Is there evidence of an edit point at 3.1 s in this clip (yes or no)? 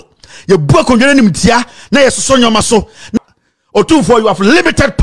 yes